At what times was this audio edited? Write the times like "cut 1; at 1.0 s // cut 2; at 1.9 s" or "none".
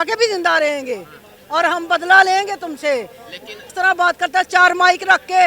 cut 1; at 3.7 s